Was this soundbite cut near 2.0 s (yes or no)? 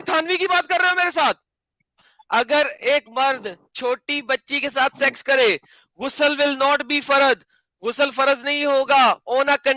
yes